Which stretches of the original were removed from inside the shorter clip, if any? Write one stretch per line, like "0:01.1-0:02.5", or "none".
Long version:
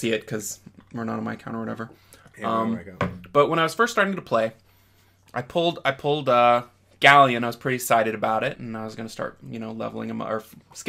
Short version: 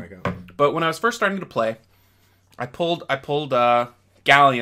none

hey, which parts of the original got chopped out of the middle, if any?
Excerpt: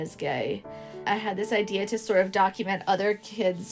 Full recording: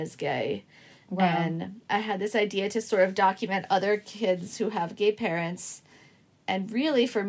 0:00.9-0:01.7

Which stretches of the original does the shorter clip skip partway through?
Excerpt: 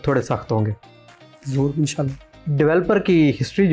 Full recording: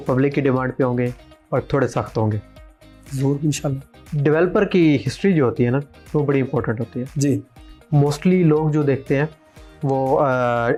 none

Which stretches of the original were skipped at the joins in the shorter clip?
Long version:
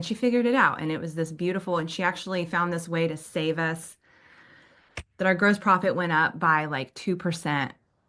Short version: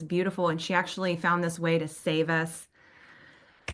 none

